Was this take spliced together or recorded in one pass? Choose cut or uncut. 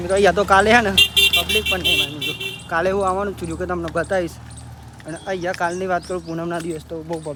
uncut